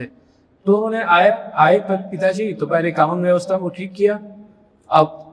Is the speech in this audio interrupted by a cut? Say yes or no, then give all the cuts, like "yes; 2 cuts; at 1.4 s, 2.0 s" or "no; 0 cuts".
no; 0 cuts